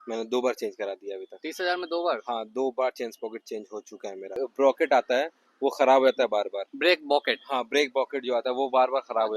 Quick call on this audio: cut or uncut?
cut